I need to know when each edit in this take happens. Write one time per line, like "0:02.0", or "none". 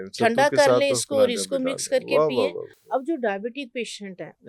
none